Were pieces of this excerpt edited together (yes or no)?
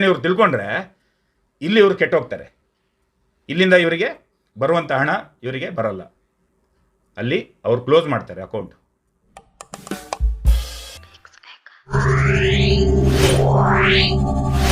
yes